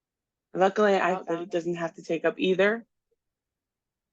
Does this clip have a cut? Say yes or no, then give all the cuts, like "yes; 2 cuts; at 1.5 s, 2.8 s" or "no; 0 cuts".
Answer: yes; 1 cut; at 1.2 s